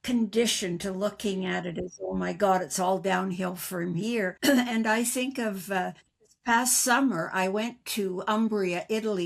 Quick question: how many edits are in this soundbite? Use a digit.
1